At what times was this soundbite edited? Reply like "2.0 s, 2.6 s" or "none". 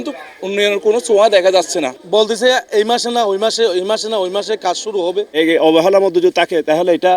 2.0 s, 5.3 s